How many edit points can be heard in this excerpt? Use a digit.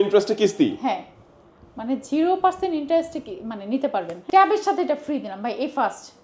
1